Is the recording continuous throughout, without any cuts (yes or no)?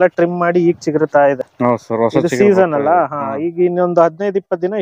yes